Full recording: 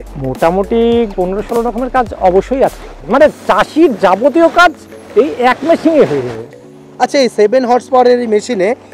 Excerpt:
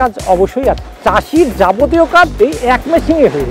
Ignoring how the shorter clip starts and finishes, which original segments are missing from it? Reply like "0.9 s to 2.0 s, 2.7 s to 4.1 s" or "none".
2.9 s to 3.4 s, 4.8 s to 5.1 s